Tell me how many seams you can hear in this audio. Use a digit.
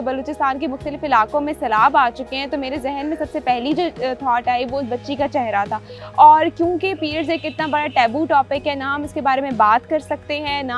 1